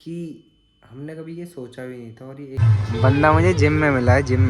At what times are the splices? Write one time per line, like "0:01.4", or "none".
0:02.6